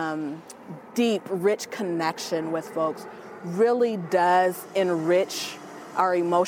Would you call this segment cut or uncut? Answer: uncut